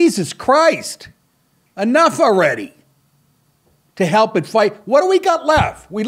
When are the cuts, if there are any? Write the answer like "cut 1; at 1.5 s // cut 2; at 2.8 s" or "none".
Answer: none